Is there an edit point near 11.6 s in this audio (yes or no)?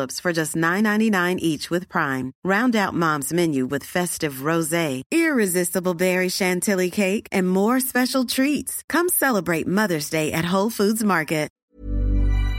yes